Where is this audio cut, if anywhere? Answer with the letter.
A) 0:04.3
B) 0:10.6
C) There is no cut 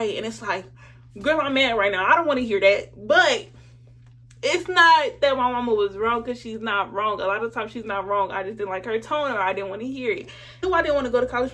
B